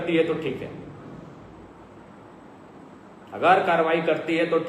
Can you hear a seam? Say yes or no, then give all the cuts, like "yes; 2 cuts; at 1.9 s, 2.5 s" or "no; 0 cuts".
no; 0 cuts